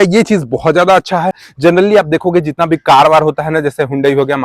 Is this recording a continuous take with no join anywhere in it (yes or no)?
no